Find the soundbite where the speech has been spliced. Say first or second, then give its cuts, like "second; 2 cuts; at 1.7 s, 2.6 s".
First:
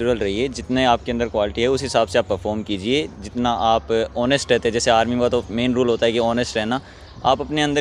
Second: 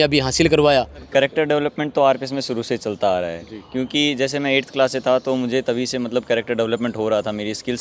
second; 1 cut; at 1.0 s